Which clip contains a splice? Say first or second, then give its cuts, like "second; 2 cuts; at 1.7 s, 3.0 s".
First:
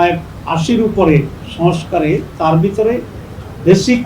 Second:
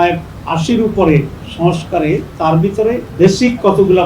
second; 1 cut; at 3.1 s